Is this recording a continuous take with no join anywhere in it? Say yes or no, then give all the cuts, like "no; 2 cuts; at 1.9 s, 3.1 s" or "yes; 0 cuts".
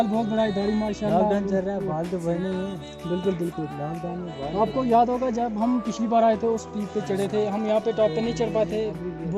yes; 0 cuts